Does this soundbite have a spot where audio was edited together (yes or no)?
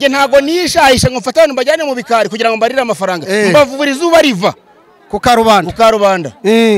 no